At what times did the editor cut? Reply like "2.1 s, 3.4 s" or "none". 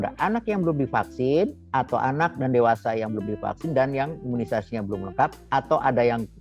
1.6 s